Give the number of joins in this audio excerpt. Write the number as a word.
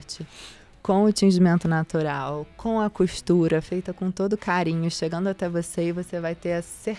zero